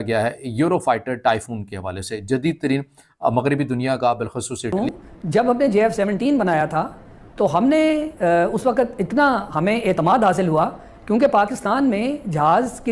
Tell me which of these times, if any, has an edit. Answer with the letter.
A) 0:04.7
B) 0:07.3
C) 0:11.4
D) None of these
A